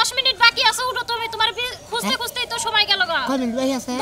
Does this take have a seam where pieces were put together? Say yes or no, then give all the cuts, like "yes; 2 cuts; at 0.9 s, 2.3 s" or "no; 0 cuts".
no; 0 cuts